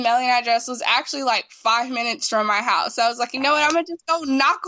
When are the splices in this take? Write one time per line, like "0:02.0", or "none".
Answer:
none